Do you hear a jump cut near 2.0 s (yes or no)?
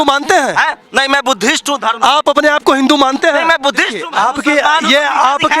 no